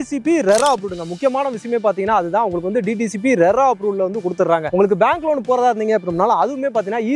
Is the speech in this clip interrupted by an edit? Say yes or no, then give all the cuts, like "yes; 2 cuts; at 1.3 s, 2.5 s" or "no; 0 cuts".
no; 0 cuts